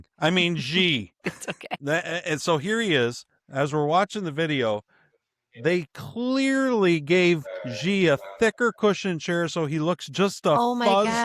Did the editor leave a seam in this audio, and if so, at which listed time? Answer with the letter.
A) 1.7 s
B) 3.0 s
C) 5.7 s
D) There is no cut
A